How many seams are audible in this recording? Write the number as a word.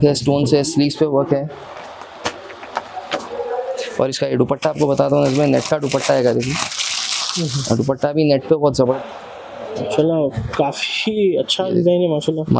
one